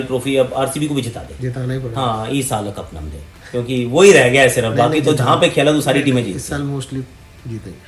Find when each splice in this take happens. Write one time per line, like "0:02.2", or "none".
none